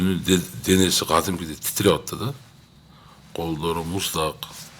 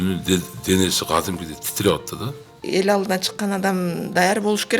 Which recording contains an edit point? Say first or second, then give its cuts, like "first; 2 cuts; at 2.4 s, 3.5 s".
second; 1 cut; at 2.6 s